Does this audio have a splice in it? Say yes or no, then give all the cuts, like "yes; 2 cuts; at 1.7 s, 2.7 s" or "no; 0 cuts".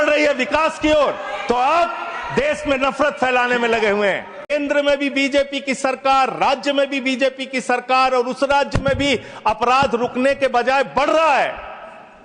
yes; 1 cut; at 4.5 s